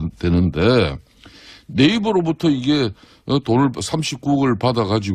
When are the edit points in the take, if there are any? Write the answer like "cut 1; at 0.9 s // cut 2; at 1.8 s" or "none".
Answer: none

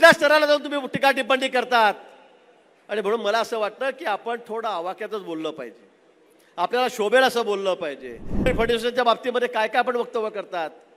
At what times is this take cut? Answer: cut 1; at 8.5 s

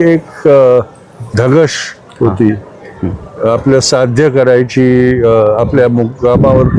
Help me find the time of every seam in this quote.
none

